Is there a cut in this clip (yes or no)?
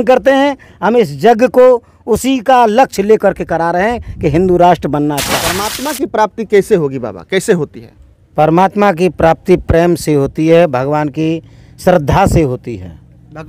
yes